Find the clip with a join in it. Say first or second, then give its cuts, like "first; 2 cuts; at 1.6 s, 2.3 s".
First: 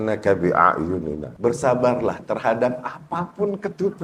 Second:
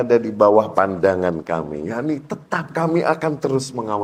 first; 1 cut; at 1.3 s